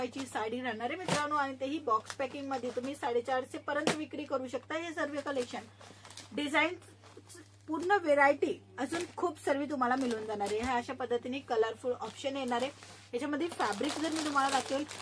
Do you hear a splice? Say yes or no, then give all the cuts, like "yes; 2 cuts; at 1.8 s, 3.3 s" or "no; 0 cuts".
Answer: no; 0 cuts